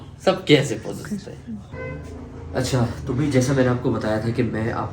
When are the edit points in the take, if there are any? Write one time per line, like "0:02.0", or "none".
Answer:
0:01.7